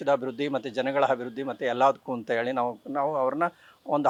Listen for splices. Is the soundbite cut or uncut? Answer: uncut